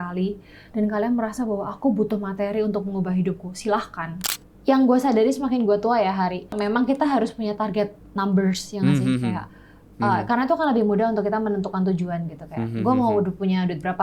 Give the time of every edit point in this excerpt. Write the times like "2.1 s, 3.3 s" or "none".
4.2 s, 6.5 s